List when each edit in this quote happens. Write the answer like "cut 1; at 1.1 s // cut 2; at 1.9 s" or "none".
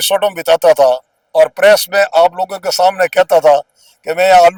none